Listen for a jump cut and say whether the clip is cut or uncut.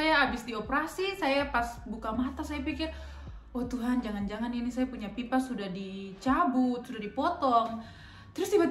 uncut